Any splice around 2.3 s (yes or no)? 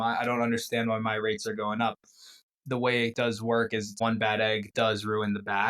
yes